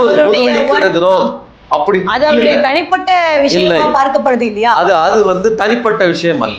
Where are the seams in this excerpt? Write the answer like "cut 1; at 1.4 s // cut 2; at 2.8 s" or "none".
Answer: none